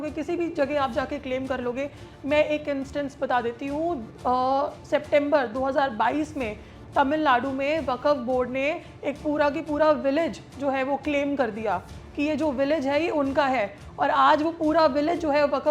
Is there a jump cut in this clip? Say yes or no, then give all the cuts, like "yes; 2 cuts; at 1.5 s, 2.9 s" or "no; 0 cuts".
no; 0 cuts